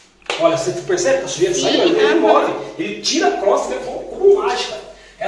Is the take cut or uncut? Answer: uncut